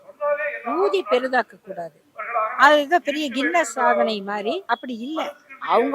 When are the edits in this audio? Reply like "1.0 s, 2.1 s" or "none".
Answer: 4.6 s